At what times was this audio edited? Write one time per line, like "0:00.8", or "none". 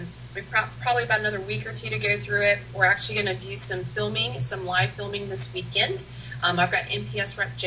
0:05.4